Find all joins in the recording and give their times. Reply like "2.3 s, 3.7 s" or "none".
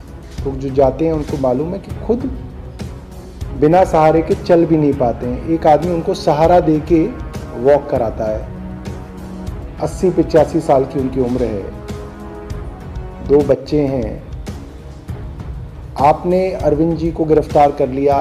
none